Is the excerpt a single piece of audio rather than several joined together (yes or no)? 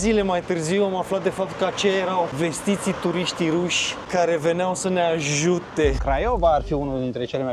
no